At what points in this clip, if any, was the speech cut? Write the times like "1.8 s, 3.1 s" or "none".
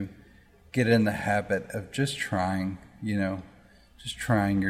none

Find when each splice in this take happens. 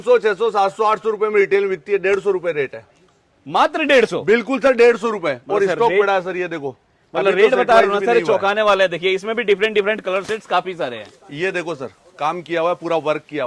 none

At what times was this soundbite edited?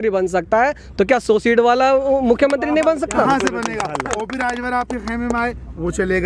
none

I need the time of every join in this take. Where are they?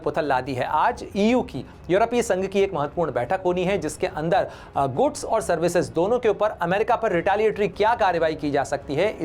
none

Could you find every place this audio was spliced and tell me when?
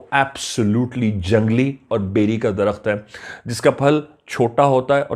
none

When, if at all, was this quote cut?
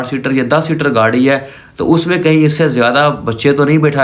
none

